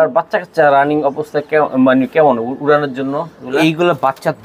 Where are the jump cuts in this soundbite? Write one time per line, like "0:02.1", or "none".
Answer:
none